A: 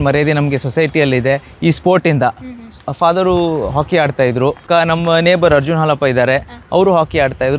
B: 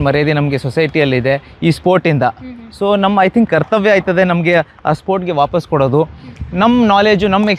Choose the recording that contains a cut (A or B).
A